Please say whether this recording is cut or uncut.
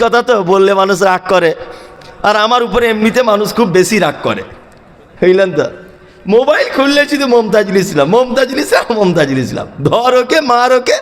uncut